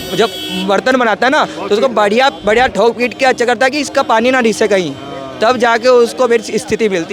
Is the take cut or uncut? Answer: uncut